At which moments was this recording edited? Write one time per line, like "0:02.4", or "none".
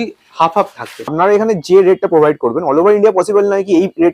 0:01.1